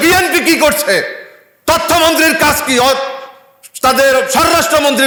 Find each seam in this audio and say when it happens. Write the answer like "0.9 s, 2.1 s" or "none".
none

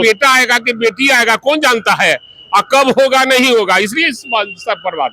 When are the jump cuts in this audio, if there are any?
none

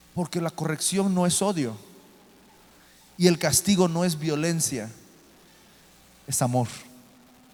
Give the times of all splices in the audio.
none

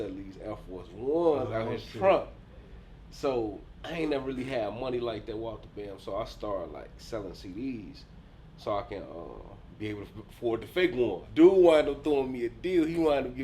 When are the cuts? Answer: 11.2 s

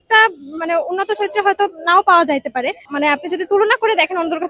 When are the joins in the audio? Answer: none

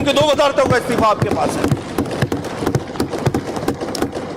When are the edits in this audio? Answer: none

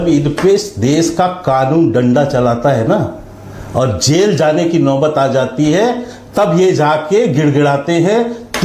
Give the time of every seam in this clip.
none

